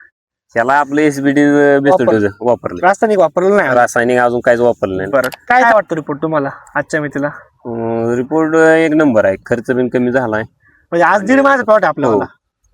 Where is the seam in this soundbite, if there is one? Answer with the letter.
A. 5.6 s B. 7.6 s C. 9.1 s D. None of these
A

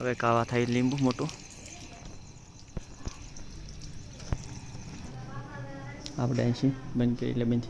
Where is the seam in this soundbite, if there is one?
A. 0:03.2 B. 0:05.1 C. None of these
B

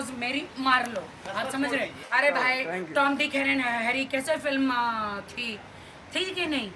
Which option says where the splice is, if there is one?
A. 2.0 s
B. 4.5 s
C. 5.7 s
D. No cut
A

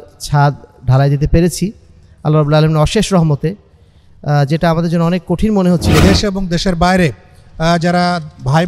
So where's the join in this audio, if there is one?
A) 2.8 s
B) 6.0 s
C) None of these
B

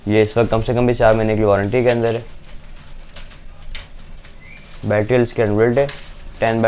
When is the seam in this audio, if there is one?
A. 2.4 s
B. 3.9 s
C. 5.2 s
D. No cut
D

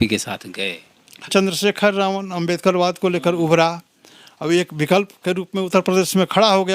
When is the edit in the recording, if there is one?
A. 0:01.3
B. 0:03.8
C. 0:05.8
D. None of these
A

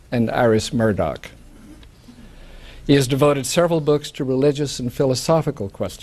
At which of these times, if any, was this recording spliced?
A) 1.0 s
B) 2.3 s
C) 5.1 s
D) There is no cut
D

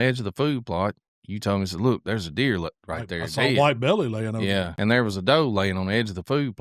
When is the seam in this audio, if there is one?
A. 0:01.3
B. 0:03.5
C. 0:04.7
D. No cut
C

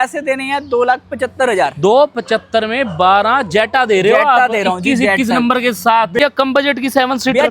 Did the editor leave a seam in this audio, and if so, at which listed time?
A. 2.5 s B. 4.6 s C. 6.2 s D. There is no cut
C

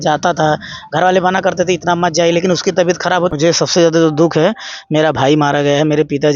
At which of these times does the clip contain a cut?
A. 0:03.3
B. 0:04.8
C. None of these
A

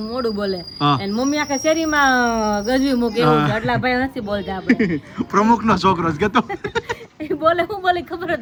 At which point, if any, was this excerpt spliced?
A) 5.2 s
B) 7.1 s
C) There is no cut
C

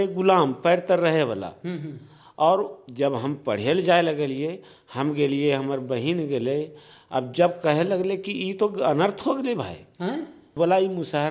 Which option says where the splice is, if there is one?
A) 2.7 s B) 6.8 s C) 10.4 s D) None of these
C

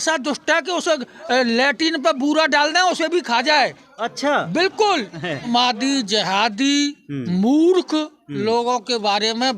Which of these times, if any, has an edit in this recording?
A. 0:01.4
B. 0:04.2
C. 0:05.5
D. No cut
C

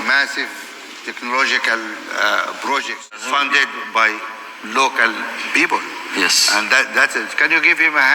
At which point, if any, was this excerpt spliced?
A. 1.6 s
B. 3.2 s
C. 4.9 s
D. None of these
B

